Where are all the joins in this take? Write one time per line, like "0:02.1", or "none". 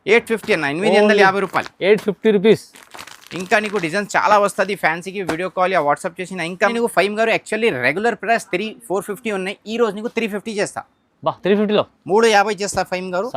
0:06.7